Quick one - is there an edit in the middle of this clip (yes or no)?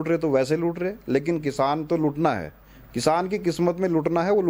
no